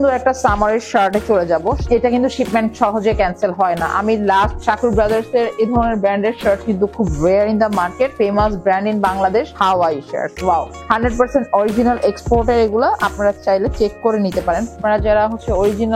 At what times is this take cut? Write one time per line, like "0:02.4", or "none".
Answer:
0:01.8
0:04.6
0:08.1
0:09.5
0:10.8
0:14.8